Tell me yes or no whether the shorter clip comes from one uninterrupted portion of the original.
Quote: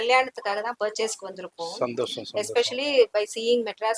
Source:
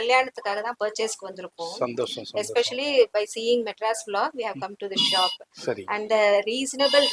yes